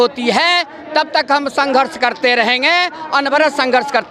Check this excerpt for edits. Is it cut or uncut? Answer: uncut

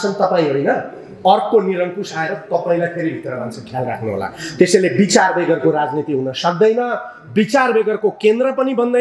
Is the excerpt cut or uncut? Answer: uncut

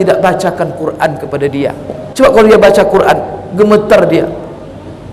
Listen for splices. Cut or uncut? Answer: cut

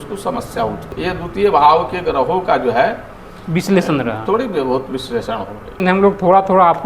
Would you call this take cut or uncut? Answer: cut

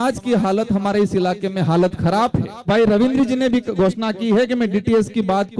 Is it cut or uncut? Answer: cut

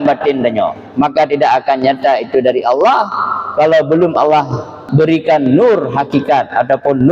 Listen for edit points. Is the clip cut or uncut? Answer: cut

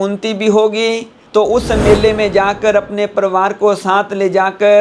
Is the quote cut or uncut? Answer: cut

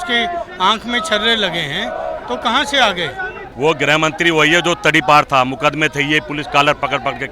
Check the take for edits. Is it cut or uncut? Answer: cut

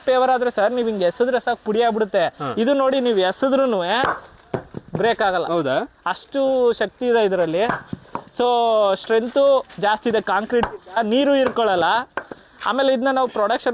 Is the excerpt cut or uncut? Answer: uncut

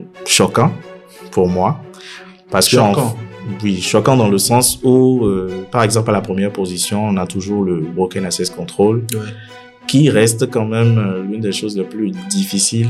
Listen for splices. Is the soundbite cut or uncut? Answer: uncut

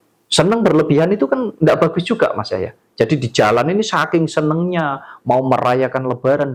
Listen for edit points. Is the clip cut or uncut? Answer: uncut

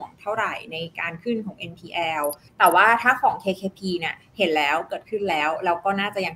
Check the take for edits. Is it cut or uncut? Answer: cut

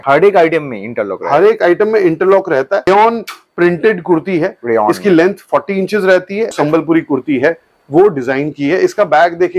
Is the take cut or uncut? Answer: cut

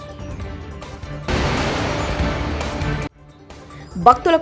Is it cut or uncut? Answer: uncut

